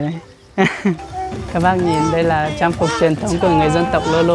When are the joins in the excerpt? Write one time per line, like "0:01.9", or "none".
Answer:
0:01.1